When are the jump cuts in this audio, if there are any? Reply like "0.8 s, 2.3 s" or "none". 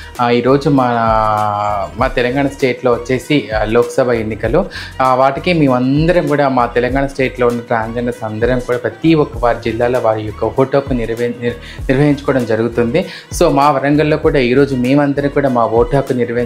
none